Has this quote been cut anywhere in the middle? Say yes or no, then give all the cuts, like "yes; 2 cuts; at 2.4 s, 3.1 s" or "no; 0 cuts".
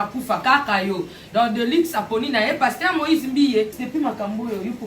yes; 1 cut; at 3.8 s